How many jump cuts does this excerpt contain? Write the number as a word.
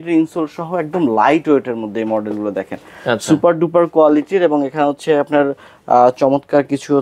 zero